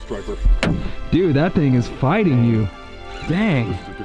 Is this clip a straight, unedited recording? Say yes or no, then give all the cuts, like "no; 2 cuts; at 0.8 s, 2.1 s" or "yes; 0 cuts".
no; 1 cut; at 0.9 s